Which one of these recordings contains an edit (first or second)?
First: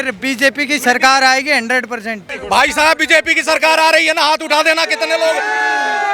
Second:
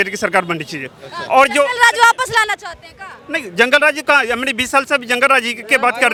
first